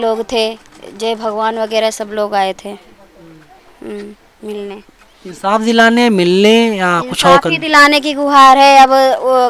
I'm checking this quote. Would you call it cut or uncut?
uncut